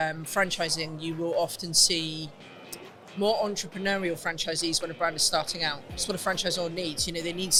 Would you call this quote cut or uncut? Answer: uncut